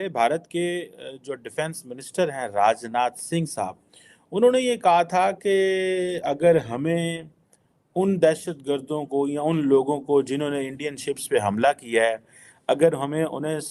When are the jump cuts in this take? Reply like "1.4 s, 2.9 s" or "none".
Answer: none